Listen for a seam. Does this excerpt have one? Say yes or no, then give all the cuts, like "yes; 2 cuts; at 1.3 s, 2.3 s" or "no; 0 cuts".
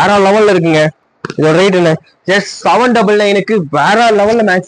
no; 0 cuts